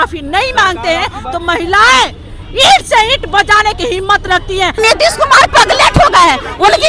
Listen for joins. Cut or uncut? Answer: cut